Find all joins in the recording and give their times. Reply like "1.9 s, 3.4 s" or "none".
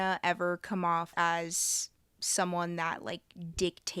1.1 s